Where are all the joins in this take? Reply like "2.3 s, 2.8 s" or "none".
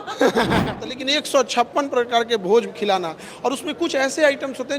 0.9 s